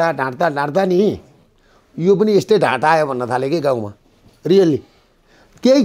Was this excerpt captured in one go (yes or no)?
yes